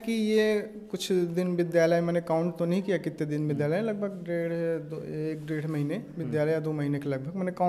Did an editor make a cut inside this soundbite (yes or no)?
no